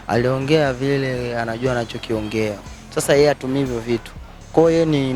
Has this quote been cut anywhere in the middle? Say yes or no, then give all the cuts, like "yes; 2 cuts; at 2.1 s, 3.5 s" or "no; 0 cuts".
yes; 1 cut; at 2.6 s